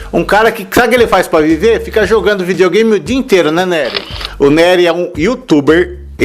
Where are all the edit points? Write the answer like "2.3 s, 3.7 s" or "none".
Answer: 4.1 s